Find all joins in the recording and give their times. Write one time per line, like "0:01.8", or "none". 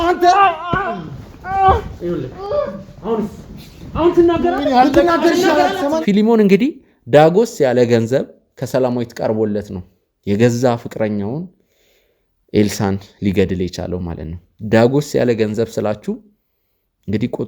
0:06.0